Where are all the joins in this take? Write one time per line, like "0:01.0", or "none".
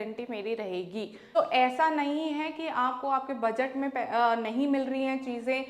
0:01.2